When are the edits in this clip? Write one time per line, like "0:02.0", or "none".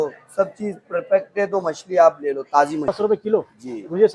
0:02.9